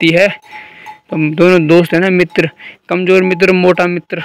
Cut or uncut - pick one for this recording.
uncut